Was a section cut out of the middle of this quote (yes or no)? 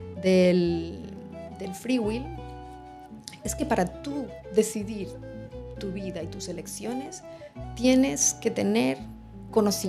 no